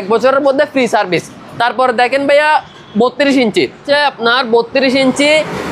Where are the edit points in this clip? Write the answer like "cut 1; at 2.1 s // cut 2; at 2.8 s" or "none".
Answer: none